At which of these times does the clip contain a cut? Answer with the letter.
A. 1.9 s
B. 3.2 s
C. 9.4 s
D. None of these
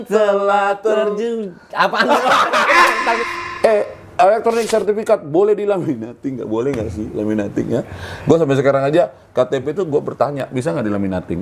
B